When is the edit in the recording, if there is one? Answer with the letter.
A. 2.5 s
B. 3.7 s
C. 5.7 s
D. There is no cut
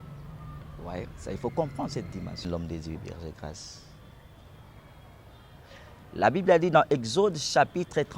A